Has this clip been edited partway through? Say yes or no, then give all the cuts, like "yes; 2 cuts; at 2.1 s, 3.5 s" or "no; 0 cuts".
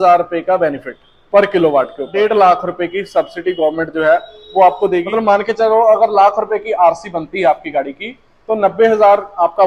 yes; 2 cuts; at 2.1 s, 5.1 s